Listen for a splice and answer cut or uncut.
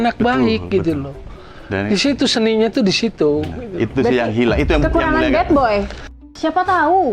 cut